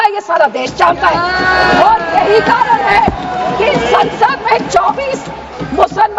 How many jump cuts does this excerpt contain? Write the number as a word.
zero